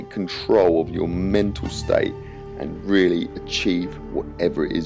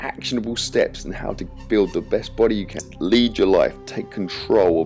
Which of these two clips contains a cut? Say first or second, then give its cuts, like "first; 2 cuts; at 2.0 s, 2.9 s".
second; 1 cut; at 2.9 s